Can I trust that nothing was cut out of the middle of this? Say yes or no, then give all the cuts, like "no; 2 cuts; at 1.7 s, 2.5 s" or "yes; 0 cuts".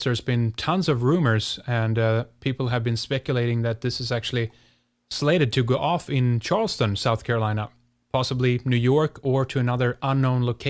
no; 1 cut; at 3.9 s